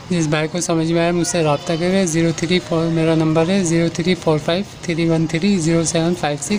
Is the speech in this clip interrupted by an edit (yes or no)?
no